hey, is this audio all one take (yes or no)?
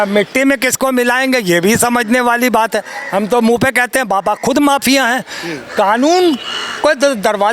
yes